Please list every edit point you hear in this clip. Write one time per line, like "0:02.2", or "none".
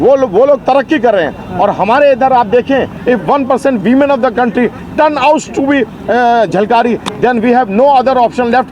0:02.9